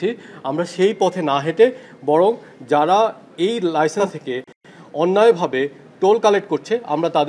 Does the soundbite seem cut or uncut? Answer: uncut